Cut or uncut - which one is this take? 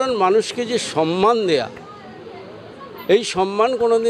uncut